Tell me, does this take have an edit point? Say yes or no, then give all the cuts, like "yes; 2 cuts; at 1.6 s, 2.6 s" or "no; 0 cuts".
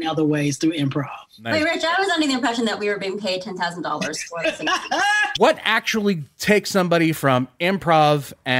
yes; 1 cut; at 5.4 s